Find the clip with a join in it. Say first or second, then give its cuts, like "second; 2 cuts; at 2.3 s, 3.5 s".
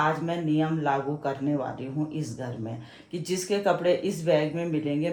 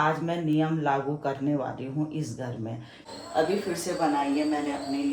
second; 1 cut; at 3.2 s